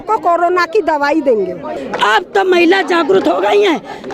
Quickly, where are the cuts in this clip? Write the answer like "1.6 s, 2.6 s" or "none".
1.8 s